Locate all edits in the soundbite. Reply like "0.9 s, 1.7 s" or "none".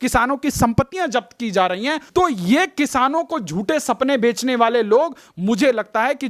2.0 s